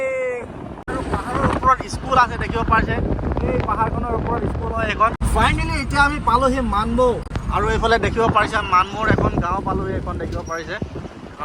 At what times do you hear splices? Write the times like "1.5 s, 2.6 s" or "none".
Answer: 0.9 s, 5.2 s